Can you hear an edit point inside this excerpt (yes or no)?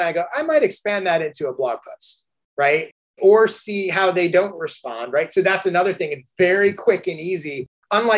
yes